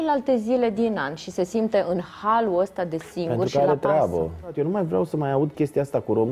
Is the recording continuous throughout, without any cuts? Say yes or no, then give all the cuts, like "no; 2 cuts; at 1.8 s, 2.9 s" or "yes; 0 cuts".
no; 1 cut; at 4.5 s